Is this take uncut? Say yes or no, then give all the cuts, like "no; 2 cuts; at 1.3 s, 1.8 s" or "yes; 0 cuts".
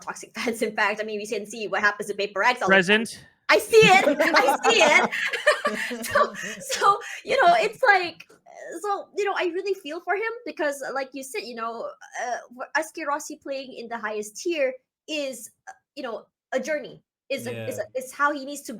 yes; 0 cuts